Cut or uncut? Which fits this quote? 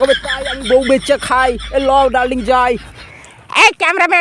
uncut